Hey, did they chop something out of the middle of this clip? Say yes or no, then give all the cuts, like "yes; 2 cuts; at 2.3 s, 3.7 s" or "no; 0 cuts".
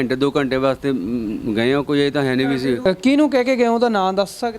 yes; 1 cut; at 2.8 s